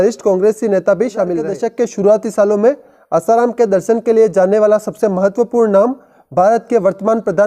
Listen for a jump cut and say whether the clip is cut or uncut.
cut